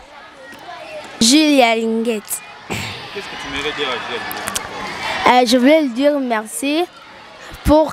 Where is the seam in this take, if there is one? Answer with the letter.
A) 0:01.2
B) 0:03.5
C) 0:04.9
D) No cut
A